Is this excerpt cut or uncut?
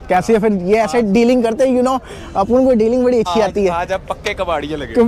uncut